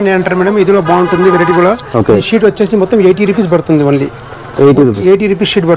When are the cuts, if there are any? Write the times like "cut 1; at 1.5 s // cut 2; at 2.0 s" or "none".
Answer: none